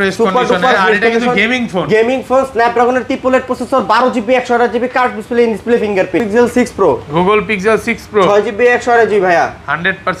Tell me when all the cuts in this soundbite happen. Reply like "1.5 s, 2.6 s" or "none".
6.2 s